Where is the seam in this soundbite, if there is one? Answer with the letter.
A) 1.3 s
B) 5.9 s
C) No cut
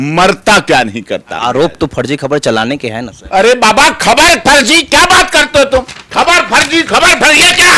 A